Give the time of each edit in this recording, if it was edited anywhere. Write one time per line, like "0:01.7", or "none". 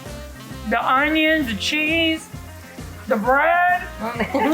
none